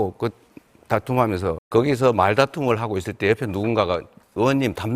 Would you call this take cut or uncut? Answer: cut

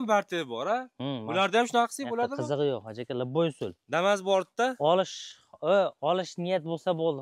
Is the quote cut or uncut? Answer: uncut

